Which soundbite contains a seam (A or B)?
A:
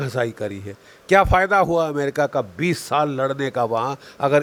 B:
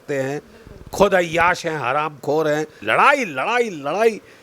B